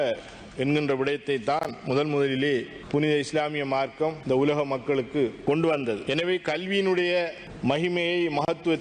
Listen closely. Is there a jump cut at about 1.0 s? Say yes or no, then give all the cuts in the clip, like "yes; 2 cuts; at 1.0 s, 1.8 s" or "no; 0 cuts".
no; 5 cuts; at 2.8 s, 4.2 s, 5.4 s, 6.0 s, 7.4 s